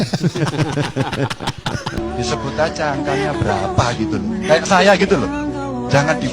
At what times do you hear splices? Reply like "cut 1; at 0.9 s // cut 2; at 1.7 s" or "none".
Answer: cut 1; at 2.0 s

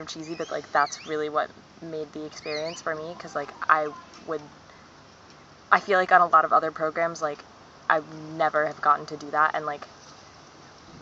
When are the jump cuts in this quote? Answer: cut 1; at 9.0 s

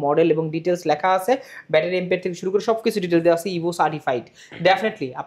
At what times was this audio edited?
none

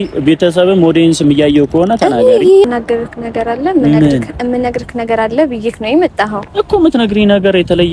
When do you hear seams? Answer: cut 1; at 2.7 s

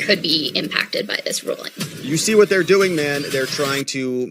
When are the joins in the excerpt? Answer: cut 1; at 1.9 s

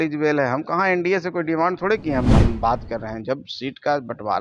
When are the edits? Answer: cut 1; at 2.3 s

